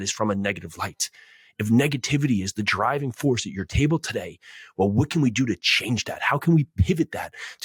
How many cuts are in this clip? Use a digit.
0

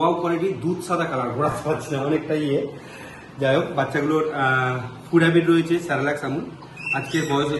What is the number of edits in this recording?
0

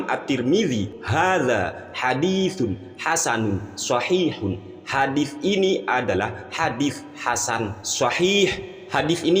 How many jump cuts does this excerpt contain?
1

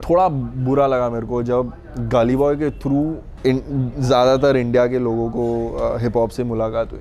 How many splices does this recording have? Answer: 1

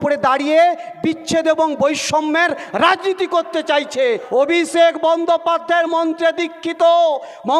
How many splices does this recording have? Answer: 1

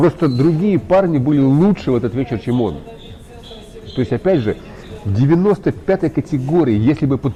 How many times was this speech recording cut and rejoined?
0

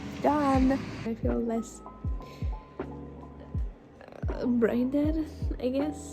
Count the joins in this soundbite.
1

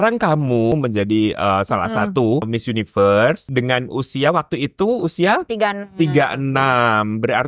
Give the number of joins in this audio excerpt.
3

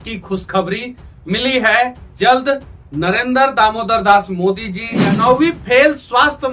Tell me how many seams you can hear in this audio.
1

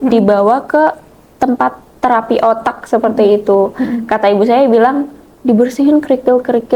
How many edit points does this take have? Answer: 0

